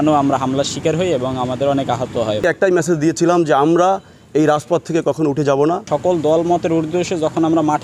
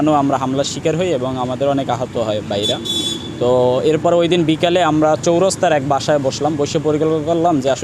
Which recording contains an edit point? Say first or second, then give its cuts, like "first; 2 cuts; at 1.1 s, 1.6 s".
first; 2 cuts; at 2.4 s, 5.8 s